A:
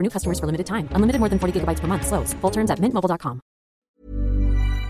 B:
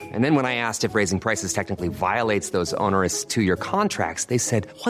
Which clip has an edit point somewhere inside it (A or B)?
A